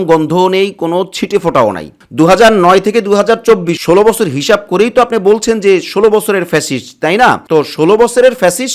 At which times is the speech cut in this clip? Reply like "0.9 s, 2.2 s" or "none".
2.0 s

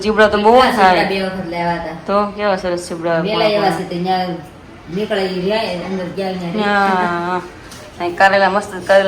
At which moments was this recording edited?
none

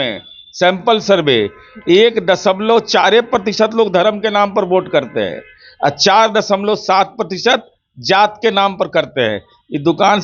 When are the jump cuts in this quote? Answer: none

